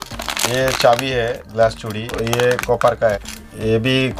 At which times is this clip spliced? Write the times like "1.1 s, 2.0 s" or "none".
2.2 s, 3.2 s